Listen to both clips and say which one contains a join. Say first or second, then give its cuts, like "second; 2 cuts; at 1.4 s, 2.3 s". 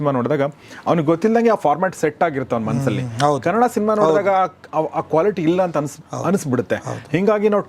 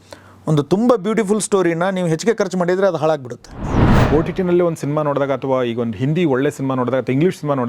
second; 1 cut; at 3.9 s